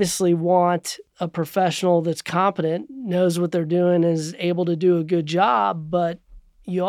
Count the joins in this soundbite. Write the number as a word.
one